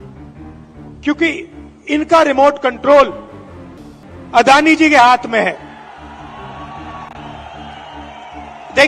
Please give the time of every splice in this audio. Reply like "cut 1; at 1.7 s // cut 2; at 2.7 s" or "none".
cut 1; at 0.9 s